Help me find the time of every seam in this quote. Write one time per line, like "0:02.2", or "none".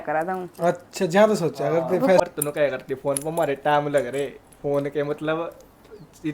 0:02.2